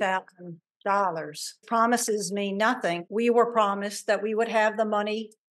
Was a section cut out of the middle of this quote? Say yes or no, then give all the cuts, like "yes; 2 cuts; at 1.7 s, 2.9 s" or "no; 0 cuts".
yes; 2 cuts; at 1.6 s, 3.0 s